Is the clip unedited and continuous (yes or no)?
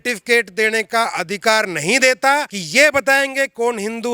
no